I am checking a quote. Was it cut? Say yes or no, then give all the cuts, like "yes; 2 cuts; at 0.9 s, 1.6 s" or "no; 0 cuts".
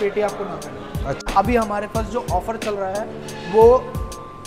yes; 1 cut; at 1.2 s